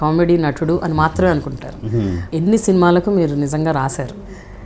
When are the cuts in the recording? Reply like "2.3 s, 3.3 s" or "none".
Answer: 2.2 s